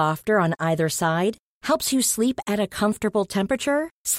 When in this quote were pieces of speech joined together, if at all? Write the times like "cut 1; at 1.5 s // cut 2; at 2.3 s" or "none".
none